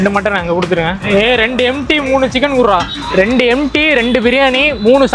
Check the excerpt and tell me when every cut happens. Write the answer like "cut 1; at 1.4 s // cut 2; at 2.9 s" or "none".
cut 1; at 1.0 s